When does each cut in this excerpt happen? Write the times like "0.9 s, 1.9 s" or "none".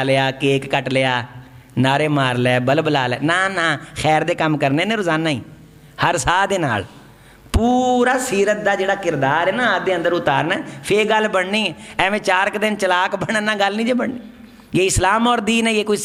none